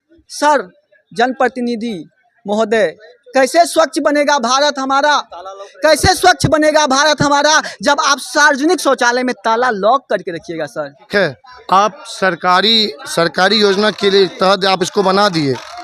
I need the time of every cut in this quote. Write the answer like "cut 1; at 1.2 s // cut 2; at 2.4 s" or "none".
cut 1; at 11.1 s